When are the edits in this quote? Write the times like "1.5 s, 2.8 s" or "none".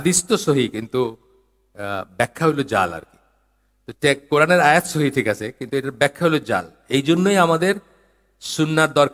none